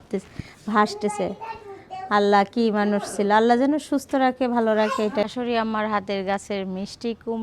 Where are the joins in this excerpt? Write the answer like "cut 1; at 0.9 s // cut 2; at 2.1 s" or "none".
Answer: cut 1; at 5.2 s